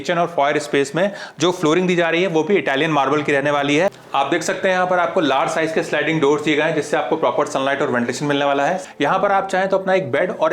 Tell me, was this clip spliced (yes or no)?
yes